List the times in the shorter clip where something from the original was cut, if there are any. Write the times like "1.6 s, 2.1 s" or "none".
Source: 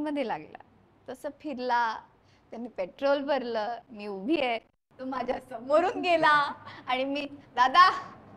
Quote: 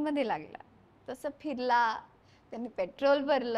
none